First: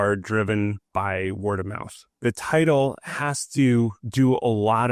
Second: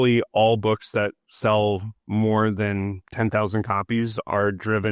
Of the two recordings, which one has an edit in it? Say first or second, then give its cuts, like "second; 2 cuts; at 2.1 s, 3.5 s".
first; 1 cut; at 4.0 s